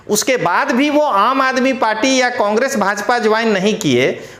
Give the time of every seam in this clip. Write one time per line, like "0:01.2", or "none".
none

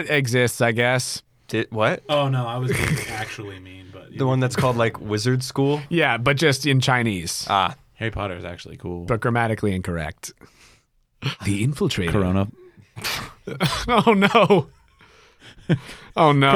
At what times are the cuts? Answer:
0:11.4

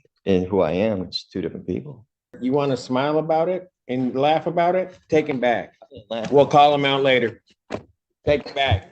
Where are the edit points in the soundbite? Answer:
0:02.3

